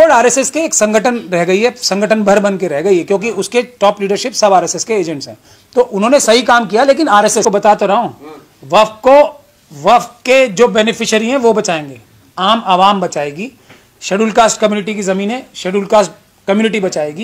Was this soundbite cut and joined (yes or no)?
no